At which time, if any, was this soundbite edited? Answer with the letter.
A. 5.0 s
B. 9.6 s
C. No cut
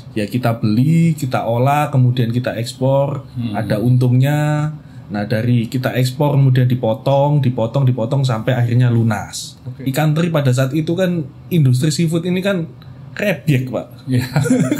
B